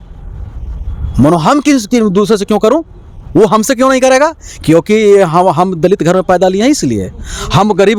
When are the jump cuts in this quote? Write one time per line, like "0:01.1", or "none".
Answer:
none